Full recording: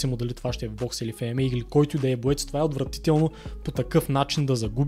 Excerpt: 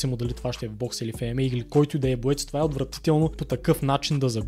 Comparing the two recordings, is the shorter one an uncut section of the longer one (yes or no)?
no